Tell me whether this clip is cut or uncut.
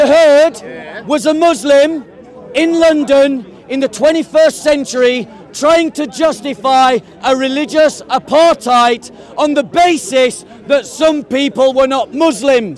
uncut